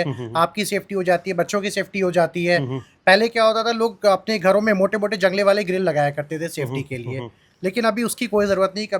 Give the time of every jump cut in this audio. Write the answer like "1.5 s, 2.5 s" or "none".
none